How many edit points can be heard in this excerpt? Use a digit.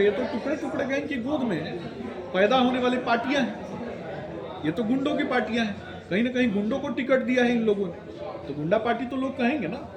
0